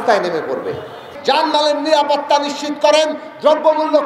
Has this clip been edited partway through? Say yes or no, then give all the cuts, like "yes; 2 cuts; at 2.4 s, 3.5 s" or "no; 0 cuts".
yes; 1 cut; at 1.1 s